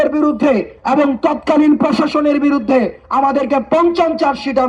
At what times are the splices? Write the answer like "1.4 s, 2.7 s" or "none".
none